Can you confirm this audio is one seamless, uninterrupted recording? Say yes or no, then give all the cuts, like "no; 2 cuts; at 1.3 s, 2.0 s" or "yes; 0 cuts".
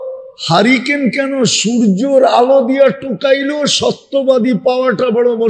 yes; 0 cuts